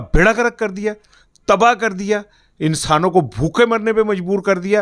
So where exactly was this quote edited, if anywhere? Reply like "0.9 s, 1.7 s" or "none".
none